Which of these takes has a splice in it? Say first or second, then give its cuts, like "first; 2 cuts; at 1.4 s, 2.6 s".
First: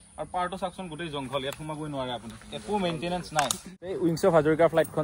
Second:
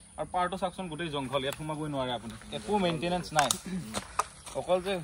first; 1 cut; at 3.9 s